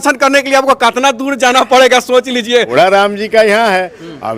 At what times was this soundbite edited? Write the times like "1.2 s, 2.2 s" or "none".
2.7 s